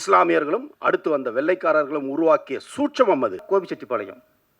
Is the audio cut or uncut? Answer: cut